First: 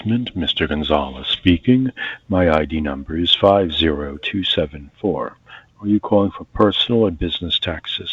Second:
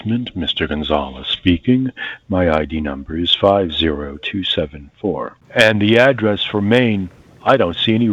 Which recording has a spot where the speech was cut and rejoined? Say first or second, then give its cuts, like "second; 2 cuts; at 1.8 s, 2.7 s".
second; 1 cut; at 5.4 s